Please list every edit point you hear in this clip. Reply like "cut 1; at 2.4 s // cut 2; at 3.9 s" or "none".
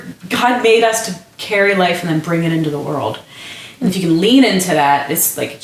none